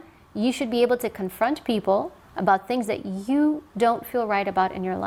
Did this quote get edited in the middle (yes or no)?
no